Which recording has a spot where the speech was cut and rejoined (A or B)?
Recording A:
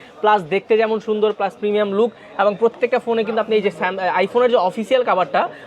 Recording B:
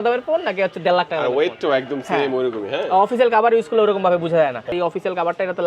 B